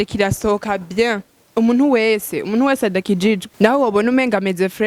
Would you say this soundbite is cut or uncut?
cut